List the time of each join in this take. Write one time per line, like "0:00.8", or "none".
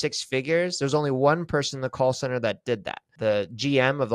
0:03.1